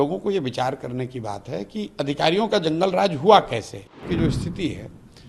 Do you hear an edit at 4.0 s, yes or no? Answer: yes